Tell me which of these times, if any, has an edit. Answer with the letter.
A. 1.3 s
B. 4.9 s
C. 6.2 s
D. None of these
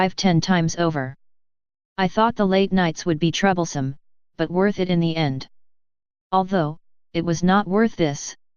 D